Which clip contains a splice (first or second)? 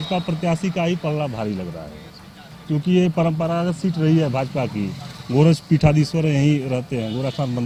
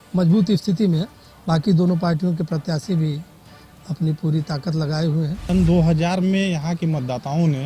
second